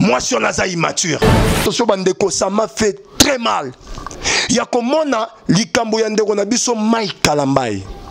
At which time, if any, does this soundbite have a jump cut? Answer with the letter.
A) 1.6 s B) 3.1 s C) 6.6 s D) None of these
A